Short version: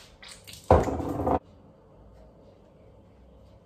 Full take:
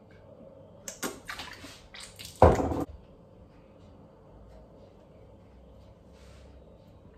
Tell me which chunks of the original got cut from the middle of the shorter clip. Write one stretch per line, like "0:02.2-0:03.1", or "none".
0:03.1-0:03.7